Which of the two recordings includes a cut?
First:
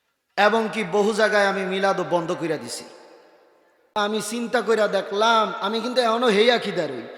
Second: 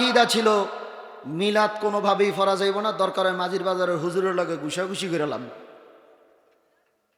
first; 1 cut; at 3.8 s

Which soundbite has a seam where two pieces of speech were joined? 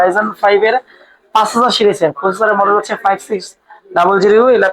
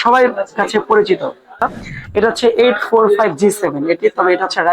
second; 1 cut; at 1.6 s

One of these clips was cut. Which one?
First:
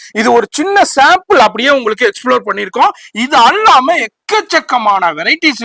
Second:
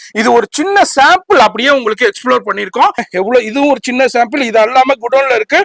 second; 1 cut; at 3.0 s

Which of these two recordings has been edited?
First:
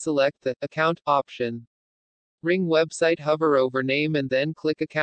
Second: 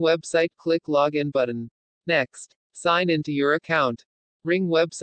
second; 1 cut; at 2.1 s

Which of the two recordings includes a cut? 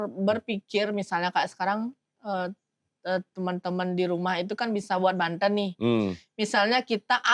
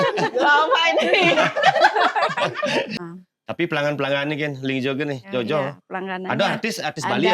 second; 1 cut; at 2.9 s

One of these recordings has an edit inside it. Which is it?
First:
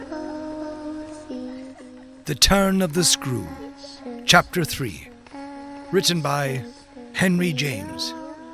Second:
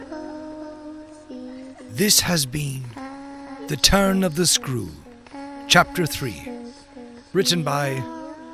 first; 1 cut; at 1.9 s

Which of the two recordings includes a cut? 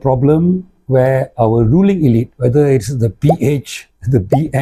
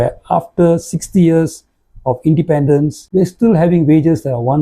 second; 1 cut; at 3.0 s

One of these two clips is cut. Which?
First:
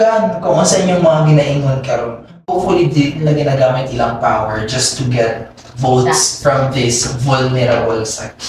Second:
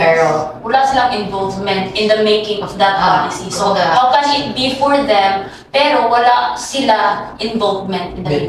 first; 1 cut; at 2.4 s

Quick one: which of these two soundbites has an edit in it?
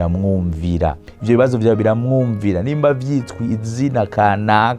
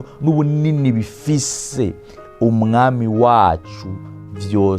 first; 1 cut; at 1.1 s

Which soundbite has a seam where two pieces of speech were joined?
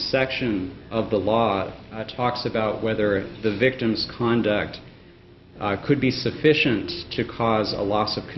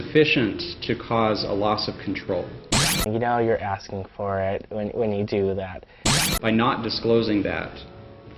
second; 2 cuts; at 3.0 s, 6.0 s

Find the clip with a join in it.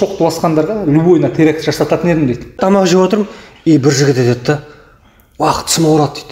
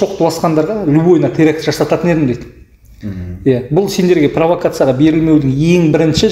first; 1 cut; at 2.6 s

